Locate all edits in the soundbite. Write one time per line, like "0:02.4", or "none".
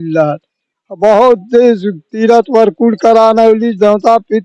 none